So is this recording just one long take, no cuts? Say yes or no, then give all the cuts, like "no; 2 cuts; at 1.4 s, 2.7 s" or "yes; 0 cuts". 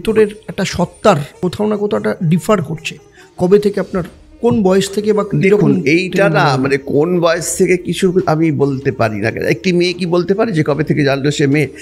no; 1 cut; at 1.3 s